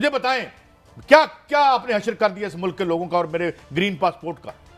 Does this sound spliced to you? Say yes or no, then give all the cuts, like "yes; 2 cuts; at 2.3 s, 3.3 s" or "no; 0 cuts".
no; 0 cuts